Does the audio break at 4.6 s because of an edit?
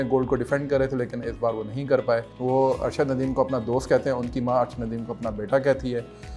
no; 1 cut; at 2.3 s

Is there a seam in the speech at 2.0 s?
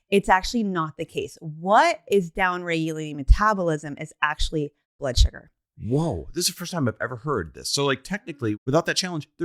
no; 1 cut; at 8.5 s

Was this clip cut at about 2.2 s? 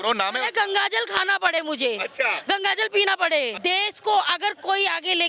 no; 1 cut; at 3.5 s

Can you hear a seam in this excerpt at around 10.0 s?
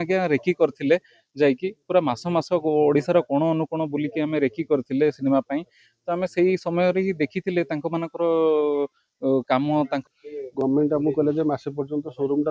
yes; 1 cut; at 10.0 s

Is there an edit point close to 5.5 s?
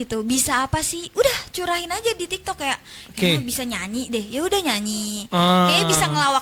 no; 0 cuts

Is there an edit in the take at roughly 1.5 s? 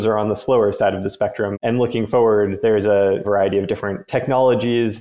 yes; 2 cuts; at 1.5 s, 3.2 s

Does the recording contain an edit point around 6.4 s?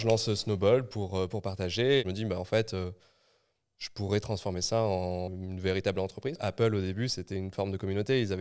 yes; 3 cuts; at 2.0 s, 5.3 s, 6.4 s

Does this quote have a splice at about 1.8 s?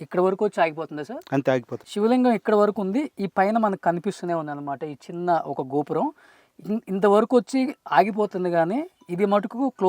yes; 1 cut; at 1.8 s

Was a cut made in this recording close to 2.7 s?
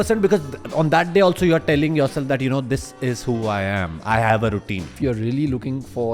no; 1 cut; at 4.9 s

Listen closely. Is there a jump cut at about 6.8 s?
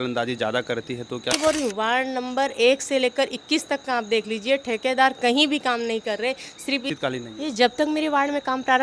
yes; 2 cuts; at 1.3 s, 6.8 s

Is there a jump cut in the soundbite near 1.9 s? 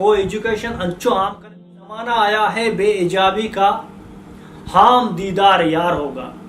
yes; 1 cut; at 1.9 s

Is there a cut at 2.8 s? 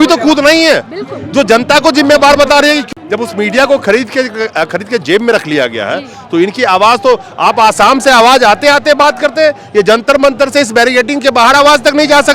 yes; 1 cut; at 2.8 s

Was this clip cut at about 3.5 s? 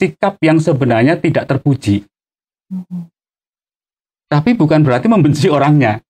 no; 0 cuts

